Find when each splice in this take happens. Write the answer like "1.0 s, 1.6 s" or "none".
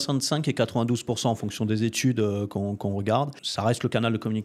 3.4 s